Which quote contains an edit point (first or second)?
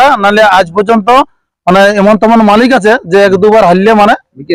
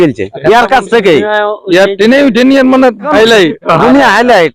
second